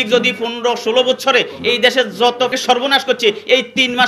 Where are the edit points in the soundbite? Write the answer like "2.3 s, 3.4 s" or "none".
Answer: 2.5 s